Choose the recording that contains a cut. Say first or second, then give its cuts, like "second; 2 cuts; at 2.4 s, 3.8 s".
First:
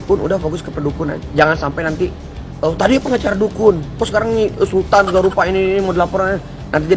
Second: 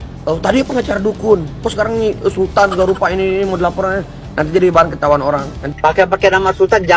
second; 1 cut; at 5.6 s